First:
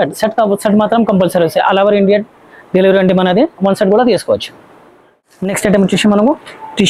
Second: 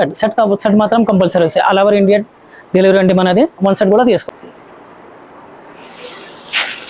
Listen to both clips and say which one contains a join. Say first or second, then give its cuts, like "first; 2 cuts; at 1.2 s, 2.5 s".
second; 1 cut; at 4.2 s